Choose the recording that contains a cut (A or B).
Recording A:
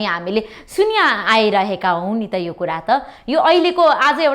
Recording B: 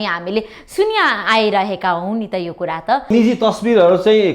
B